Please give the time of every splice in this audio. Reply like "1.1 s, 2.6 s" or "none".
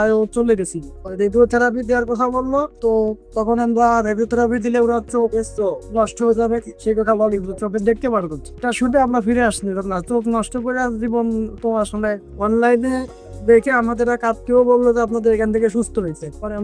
1.0 s, 12.3 s